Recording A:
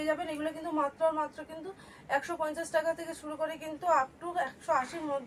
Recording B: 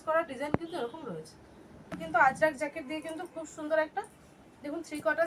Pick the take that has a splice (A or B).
B